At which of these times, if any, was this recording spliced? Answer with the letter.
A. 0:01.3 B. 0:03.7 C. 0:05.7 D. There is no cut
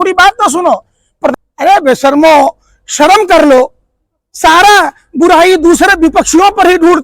A